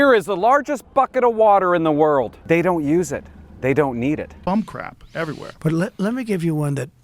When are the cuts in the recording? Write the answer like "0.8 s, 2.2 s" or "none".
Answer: 4.3 s